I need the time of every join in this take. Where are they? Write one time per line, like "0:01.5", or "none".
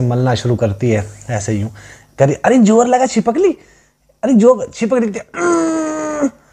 none